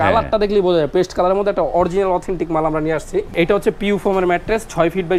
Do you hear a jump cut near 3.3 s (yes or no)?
yes